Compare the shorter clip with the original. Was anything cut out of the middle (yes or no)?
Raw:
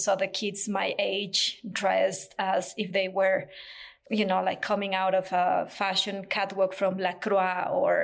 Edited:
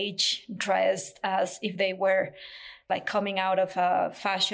yes